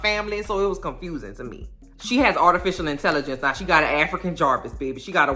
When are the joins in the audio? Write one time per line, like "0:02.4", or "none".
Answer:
0:01.8